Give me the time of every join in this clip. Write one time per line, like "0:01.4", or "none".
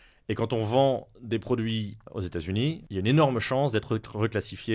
0:02.0
0:02.8